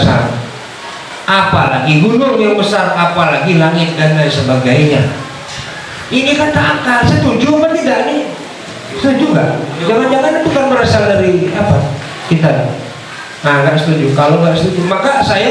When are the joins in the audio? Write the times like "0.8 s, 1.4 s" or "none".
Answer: none